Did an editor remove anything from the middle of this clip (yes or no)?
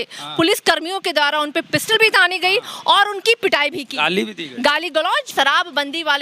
yes